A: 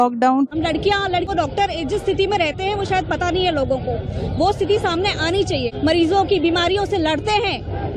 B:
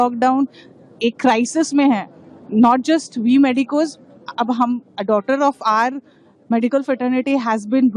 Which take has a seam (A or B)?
A